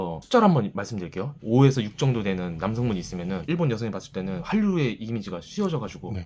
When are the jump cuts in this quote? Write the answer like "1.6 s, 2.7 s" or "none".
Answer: none